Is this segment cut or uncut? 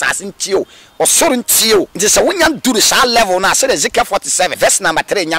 cut